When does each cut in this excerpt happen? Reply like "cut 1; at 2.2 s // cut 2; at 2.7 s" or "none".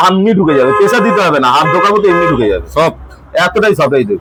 none